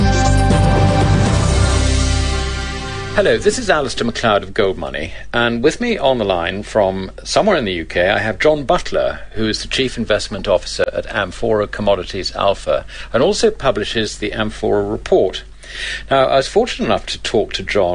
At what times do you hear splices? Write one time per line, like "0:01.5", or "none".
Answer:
0:12.3